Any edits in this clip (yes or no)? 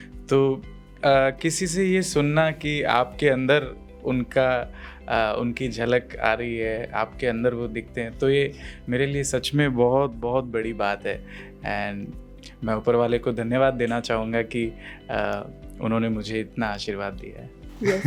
no